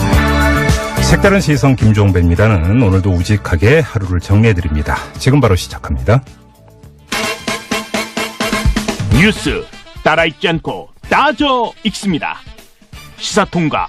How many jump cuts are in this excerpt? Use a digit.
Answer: 1